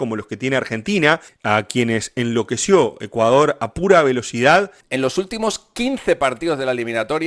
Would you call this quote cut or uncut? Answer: cut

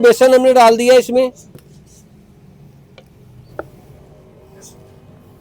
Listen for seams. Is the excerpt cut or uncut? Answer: uncut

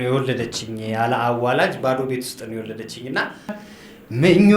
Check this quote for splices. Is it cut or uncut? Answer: cut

